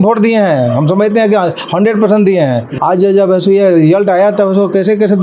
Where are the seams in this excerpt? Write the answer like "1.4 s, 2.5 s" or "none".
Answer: 2.7 s